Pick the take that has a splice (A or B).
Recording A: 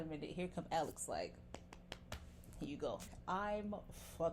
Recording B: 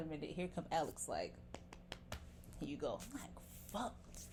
A